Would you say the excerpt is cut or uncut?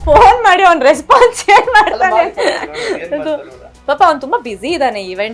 uncut